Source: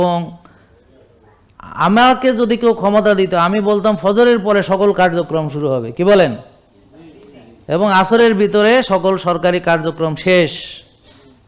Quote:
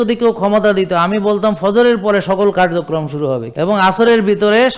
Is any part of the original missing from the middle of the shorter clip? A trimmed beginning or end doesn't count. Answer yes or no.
yes